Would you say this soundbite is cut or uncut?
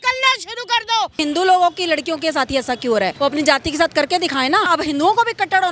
cut